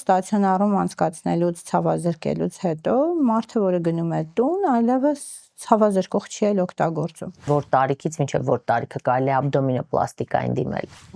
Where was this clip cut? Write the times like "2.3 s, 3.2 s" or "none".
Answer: 7.4 s